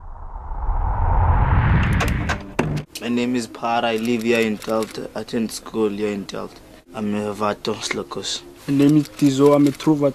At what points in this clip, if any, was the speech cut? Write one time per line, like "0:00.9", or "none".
0:01.9